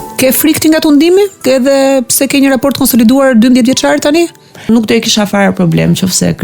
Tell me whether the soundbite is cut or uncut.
cut